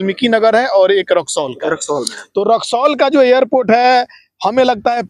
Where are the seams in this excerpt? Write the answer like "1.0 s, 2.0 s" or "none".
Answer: none